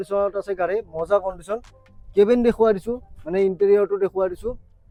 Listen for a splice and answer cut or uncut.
uncut